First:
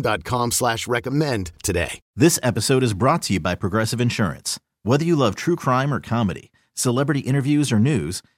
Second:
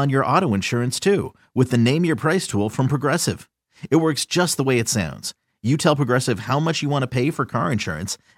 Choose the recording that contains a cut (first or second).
first